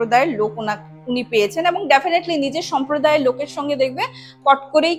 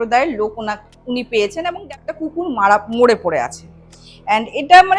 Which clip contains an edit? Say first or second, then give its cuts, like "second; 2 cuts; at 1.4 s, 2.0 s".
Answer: second; 1 cut; at 1.7 s